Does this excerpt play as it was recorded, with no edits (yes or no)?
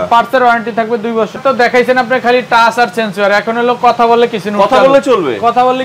no